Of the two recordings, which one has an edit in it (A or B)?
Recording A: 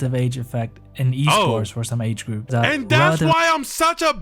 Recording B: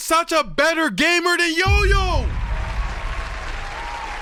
A